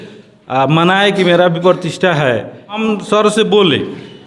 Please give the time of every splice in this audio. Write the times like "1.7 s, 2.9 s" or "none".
2.8 s